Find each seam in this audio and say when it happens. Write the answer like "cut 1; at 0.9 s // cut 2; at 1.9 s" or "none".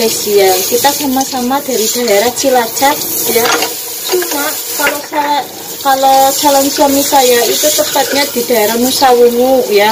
none